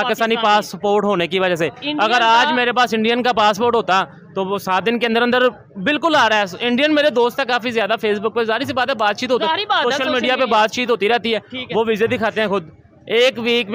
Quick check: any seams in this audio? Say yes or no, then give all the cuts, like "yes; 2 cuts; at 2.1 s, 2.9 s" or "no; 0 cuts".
no; 0 cuts